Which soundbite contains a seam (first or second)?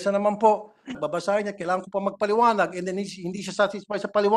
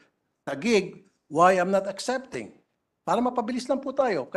first